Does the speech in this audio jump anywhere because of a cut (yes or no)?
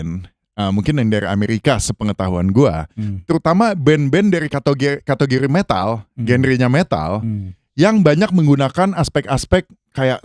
no